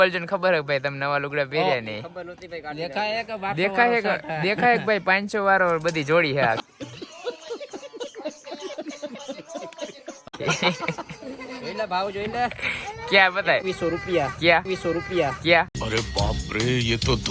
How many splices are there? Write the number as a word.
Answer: zero